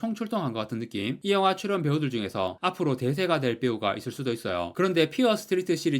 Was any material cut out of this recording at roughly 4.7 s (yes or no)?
yes